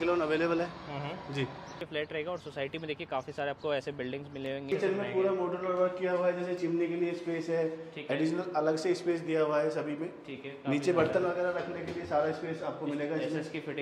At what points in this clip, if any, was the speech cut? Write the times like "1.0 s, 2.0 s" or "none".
1.8 s, 4.7 s